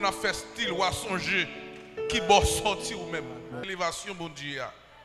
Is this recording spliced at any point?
yes; 1 cut; at 3.6 s

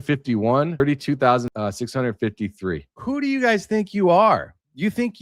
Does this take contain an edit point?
yes; 3 cuts; at 0.8 s, 1.5 s, 3.0 s

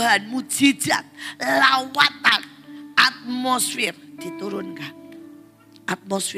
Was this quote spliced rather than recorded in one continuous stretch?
no; 0 cuts

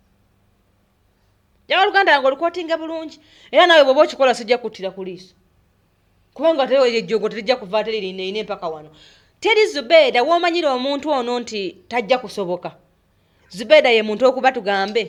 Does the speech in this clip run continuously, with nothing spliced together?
yes; 0 cuts

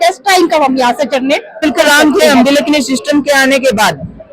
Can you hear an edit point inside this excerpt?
yes; 1 cut; at 1.6 s

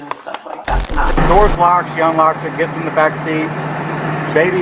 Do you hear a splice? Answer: yes; 1 cut; at 1.1 s

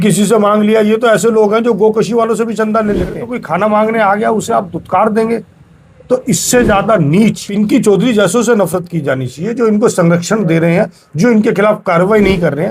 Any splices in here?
yes; 2 cuts; at 3.3 s, 7.4 s

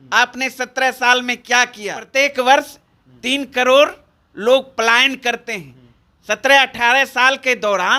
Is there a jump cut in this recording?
yes; 1 cut; at 2.1 s

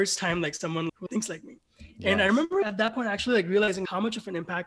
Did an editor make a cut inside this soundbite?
yes; 3 cuts; at 1.0 s, 2.6 s, 3.9 s

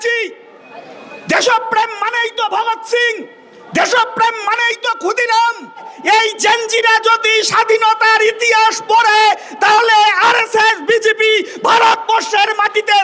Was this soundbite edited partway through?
yes; 1 cut; at 5.9 s

